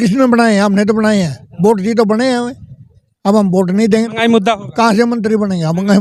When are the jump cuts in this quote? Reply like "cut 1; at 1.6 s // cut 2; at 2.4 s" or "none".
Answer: none